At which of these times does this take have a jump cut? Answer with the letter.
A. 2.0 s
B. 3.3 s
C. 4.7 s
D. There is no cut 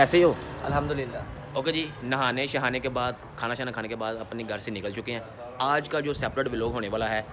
D